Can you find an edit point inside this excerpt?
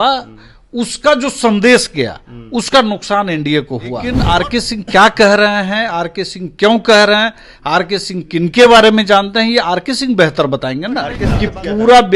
yes; 2 cuts; at 4.2 s, 11.2 s

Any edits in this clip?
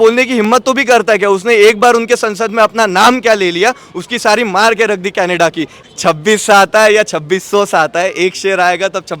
yes; 1 cut; at 5.7 s

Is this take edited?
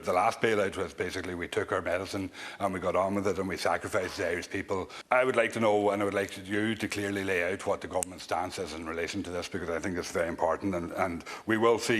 yes; 1 cut; at 5.0 s

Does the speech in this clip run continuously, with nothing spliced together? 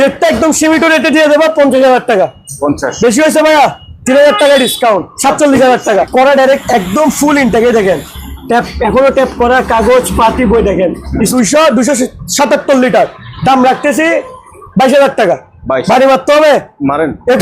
no; 2 cuts; at 6.1 s, 11.3 s

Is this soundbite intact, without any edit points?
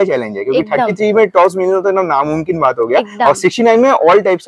yes; 0 cuts

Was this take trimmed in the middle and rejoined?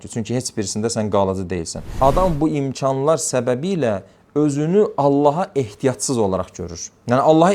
yes; 1 cut; at 1.9 s

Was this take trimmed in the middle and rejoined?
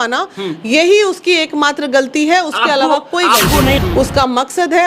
yes; 1 cut; at 3.8 s

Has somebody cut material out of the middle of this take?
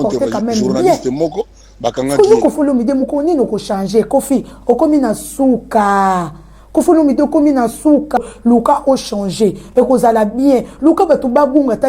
yes; 1 cut; at 8.2 s

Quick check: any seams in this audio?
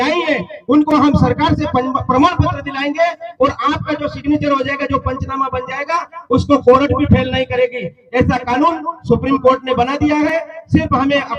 no; 0 cuts

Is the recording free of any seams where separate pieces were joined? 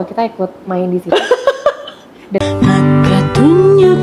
no; 1 cut; at 2.4 s

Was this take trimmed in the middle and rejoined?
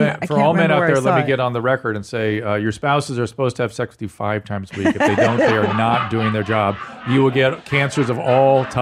no; 0 cuts

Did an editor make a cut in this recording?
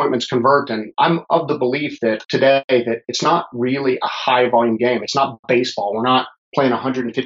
yes; 2 cuts; at 0.9 s, 2.2 s

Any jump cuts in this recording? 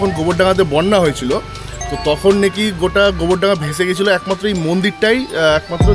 no; 0 cuts

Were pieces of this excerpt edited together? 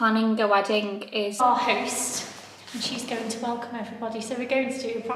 yes; 1 cut; at 1.4 s

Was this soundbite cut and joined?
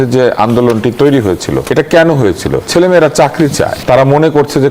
yes; 3 cuts; at 1.6 s, 2.6 s, 3.8 s

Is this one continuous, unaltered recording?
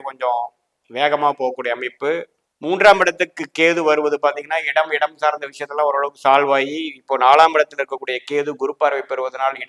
yes; 0 cuts

